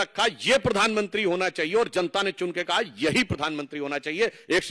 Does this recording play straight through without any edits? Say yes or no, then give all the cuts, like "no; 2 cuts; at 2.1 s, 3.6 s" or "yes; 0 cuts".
yes; 0 cuts